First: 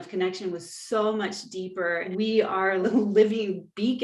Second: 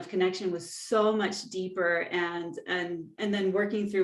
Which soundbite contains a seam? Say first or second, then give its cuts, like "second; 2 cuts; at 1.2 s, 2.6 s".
first; 2 cuts; at 2.1 s, 2.8 s